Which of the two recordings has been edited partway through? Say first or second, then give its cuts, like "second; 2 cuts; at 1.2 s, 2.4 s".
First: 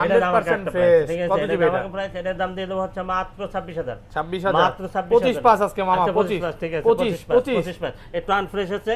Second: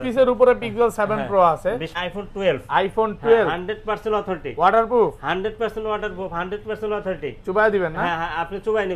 second; 1 cut; at 2.0 s